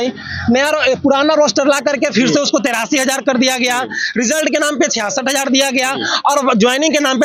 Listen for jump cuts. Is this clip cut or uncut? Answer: uncut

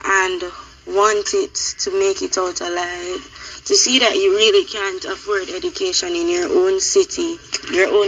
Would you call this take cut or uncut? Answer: uncut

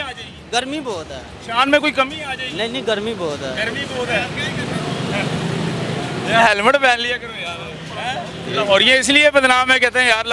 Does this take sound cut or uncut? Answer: uncut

